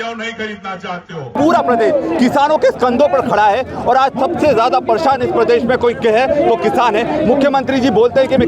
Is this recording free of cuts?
no; 1 cut; at 1.3 s

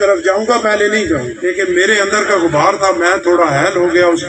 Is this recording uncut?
no; 1 cut; at 1.3 s

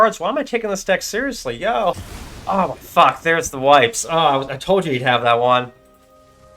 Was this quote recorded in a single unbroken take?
no; 1 cut; at 1.9 s

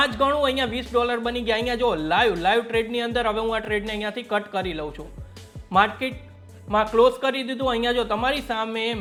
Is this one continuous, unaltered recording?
yes; 0 cuts

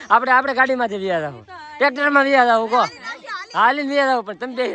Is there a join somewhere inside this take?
no; 0 cuts

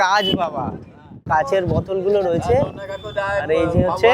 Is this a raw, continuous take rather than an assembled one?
no; 1 cut; at 1.3 s

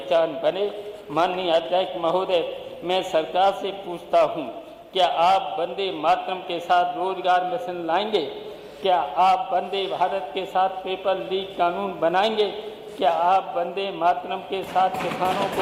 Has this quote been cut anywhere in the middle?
no; 0 cuts

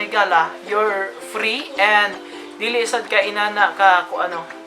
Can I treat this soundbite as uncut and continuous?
yes; 0 cuts

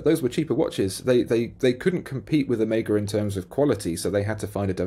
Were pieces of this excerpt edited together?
no; 0 cuts

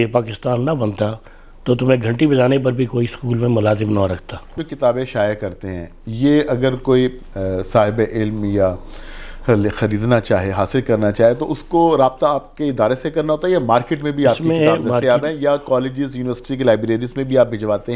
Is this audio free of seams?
no; 1 cut; at 4.6 s

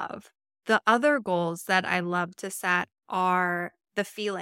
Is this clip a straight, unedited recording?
yes; 0 cuts

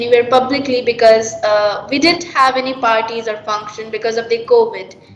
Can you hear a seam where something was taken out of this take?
no; 0 cuts

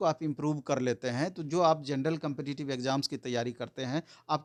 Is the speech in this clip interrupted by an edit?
no; 0 cuts

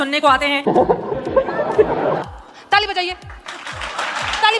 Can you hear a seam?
yes; 1 cut; at 2.3 s

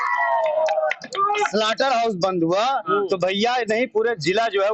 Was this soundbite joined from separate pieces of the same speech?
no; 0 cuts

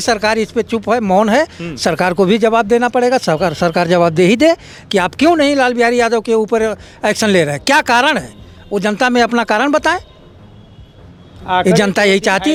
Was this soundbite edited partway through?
no; 0 cuts

